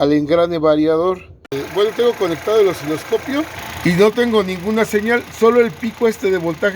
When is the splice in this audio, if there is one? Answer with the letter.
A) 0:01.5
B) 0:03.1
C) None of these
A